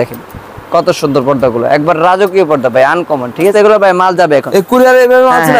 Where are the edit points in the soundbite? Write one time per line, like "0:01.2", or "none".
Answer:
0:03.5